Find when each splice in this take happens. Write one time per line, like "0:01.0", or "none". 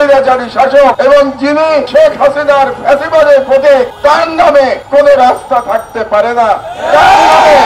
0:01.0
0:01.9
0:03.9
0:04.8